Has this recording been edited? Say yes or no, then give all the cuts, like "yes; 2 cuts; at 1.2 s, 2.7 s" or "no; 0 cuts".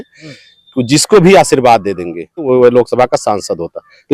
yes; 1 cut; at 2.4 s